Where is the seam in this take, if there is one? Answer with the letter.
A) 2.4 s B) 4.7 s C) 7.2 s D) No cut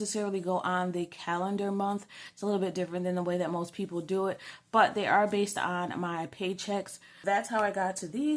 C